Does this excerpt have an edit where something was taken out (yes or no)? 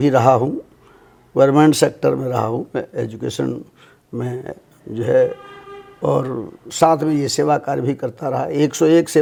no